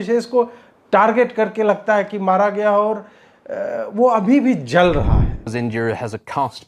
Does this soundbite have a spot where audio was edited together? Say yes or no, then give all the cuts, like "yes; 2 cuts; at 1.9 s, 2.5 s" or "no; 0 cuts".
yes; 1 cut; at 5.5 s